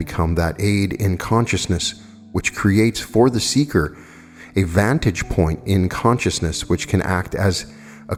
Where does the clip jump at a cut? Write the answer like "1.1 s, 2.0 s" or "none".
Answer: none

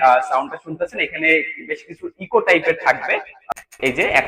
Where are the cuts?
3.3 s

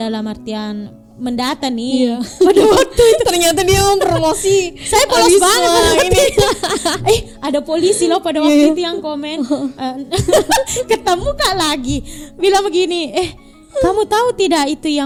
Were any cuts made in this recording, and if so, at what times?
none

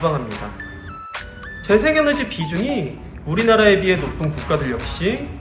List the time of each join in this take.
1.1 s

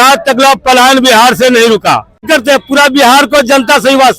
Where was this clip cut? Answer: 2.2 s

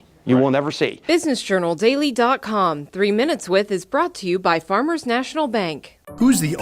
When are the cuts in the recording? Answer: 1.0 s

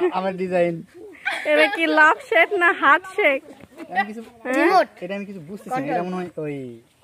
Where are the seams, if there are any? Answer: none

